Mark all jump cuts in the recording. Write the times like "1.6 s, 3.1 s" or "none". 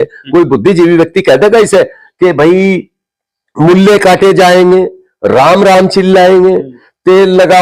none